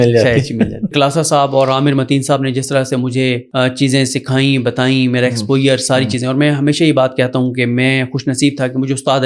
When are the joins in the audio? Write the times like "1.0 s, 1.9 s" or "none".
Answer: 0.9 s, 3.4 s